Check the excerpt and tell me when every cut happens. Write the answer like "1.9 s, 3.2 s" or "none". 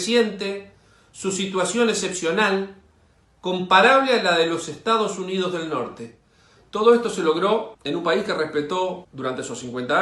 7.7 s, 9.1 s